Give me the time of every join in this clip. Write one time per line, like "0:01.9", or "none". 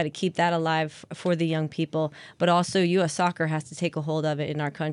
none